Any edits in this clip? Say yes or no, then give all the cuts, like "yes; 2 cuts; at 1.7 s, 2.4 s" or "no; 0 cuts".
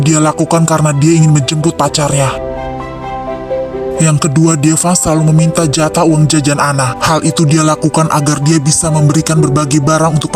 no; 0 cuts